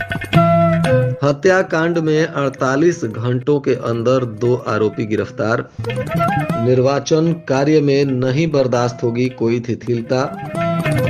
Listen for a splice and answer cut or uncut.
cut